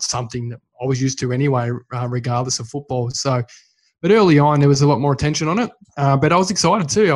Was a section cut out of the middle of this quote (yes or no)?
no